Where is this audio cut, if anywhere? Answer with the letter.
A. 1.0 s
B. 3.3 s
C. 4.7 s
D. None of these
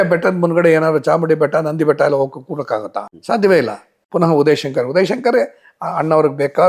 D